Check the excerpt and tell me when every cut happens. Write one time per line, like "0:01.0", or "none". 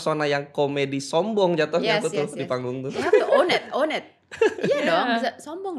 none